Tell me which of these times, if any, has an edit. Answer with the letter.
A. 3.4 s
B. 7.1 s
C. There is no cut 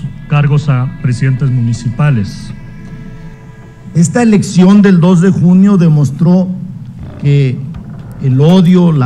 A